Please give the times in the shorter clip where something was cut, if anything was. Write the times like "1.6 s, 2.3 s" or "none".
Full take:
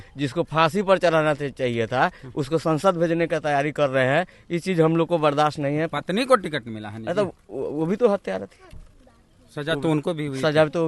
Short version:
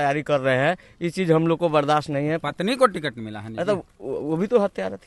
none